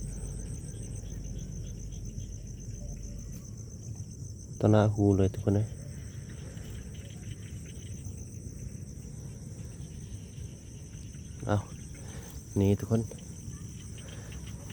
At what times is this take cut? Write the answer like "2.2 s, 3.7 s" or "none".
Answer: none